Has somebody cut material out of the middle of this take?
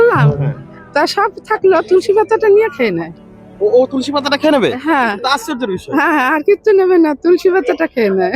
no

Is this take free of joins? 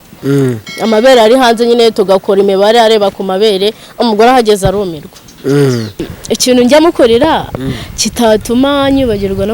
no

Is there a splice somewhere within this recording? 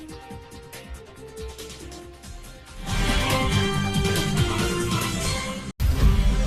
no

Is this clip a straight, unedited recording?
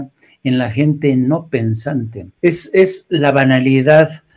no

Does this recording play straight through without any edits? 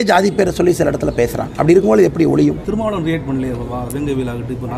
no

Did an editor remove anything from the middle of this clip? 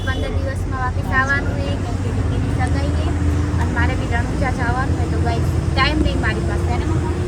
no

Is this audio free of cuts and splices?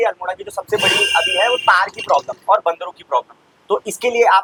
yes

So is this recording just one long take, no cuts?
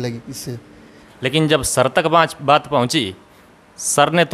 no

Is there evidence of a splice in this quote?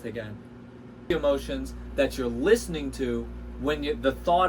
yes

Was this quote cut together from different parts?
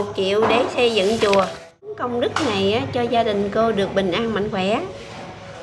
yes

